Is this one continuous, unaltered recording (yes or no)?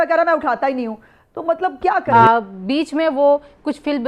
no